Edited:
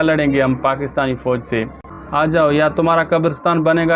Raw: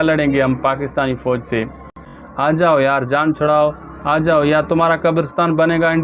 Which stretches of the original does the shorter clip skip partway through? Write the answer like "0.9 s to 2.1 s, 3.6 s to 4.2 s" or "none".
2.0 s to 3.9 s